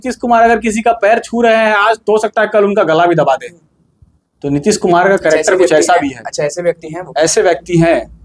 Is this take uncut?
yes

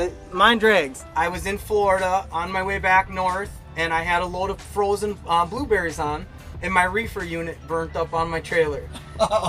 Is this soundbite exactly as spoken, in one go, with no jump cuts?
no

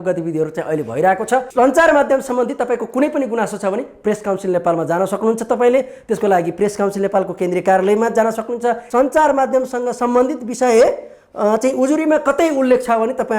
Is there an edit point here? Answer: yes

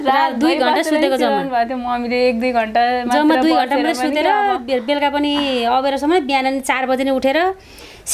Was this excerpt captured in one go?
yes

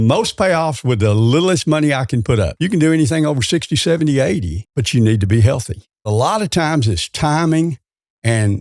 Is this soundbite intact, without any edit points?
no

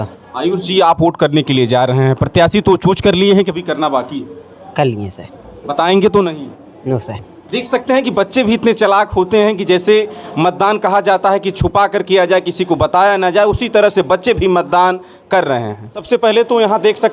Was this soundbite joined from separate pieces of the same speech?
yes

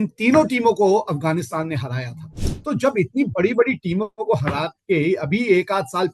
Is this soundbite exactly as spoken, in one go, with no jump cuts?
no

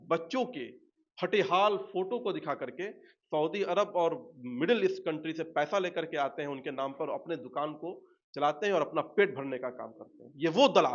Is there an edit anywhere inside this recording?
no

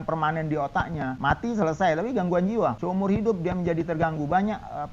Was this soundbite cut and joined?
yes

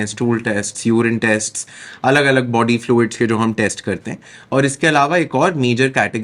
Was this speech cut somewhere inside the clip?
no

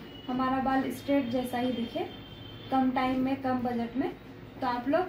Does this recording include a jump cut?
no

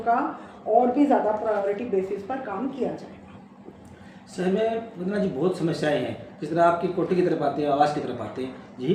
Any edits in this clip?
no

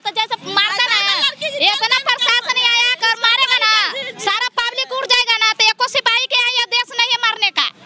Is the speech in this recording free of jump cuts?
yes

